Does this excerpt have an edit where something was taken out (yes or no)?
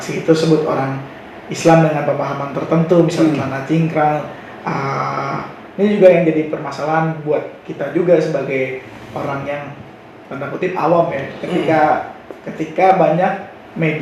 no